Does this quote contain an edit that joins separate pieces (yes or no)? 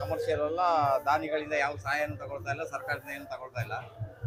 no